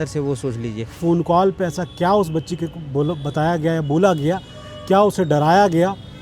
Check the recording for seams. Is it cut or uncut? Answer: cut